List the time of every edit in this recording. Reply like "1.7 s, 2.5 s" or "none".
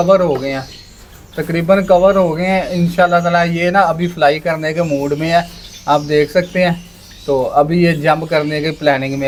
none